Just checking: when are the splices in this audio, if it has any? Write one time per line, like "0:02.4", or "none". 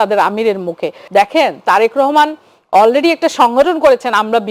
0:01.0